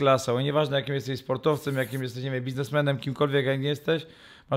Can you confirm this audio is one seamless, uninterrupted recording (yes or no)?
yes